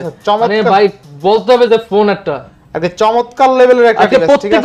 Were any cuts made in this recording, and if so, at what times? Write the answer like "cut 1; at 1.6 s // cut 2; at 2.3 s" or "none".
none